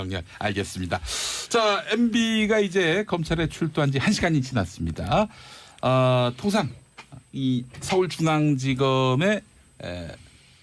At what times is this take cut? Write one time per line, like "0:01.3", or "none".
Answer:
none